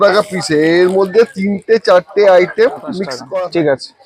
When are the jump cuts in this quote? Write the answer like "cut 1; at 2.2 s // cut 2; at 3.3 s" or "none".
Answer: cut 1; at 3.2 s